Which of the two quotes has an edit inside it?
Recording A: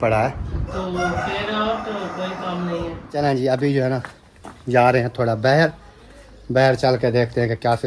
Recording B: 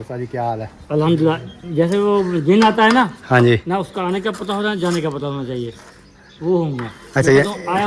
A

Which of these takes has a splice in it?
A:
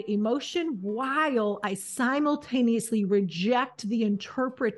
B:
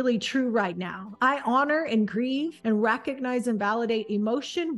B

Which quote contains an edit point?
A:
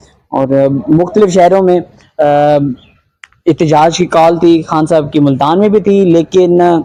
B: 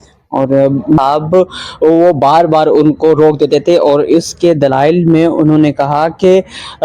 B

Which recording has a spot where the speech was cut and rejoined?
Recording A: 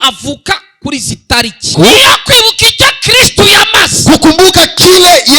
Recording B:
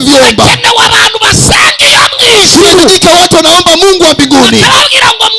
A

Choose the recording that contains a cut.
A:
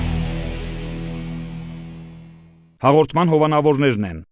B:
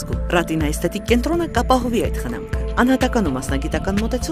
A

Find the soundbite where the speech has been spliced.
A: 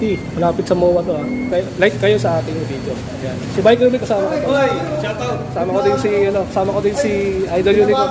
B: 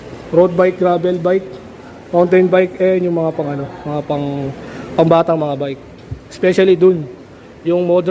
A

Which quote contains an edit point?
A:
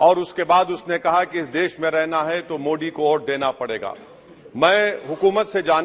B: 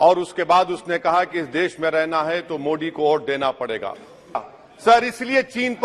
B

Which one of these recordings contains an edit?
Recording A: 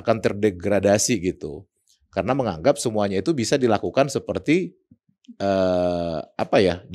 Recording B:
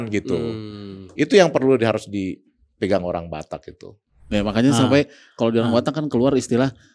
B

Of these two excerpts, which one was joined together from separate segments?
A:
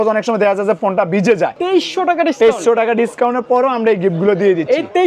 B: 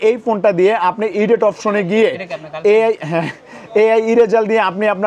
A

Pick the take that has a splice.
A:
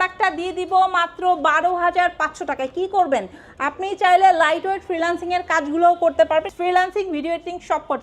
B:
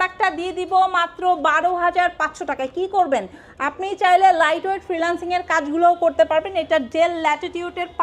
A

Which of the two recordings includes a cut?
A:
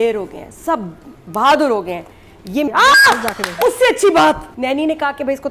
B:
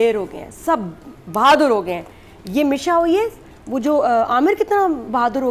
A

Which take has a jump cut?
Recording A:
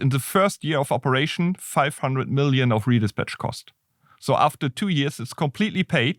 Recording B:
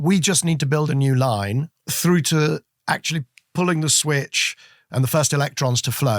B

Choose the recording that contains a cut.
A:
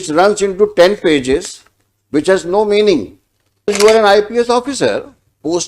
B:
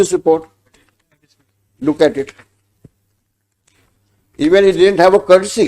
A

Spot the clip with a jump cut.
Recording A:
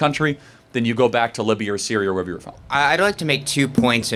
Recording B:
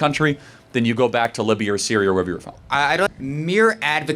B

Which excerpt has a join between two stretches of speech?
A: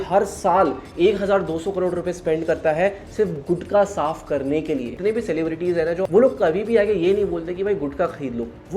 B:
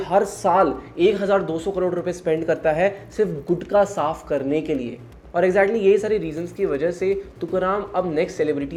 A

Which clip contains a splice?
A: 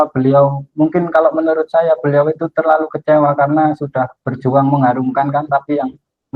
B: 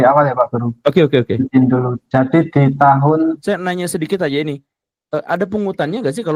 B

